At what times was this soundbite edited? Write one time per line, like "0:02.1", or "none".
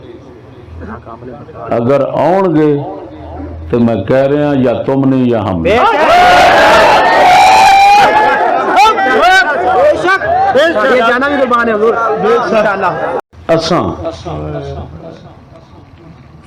0:13.2